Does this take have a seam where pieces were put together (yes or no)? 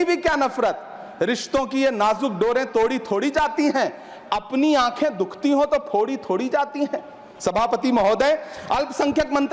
no